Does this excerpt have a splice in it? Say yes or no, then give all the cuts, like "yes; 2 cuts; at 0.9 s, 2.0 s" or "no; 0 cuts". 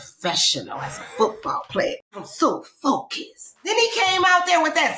yes; 2 cuts; at 2.1 s, 3.7 s